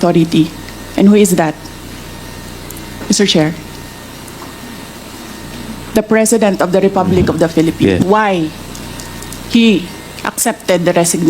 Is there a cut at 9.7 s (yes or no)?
no